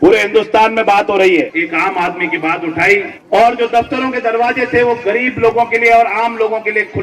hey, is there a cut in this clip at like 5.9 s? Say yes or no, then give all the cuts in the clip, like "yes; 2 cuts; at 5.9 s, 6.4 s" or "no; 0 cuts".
no; 2 cuts; at 1.5 s, 3.2 s